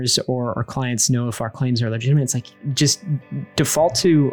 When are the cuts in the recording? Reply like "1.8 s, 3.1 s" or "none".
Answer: none